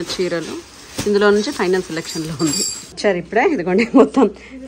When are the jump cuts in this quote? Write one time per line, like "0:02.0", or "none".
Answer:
0:02.9